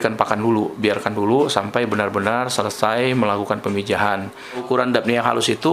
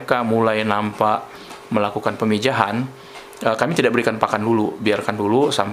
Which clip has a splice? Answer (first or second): first